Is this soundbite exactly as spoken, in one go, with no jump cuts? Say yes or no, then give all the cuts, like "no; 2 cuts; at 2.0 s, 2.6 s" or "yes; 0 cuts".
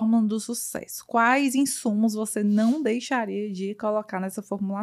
yes; 0 cuts